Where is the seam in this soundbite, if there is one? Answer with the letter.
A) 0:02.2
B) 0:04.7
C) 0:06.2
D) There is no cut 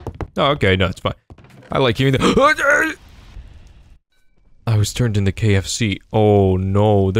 D